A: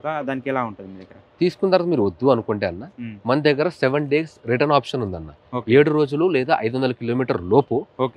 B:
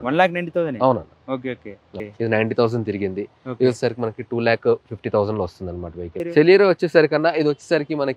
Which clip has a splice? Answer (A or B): B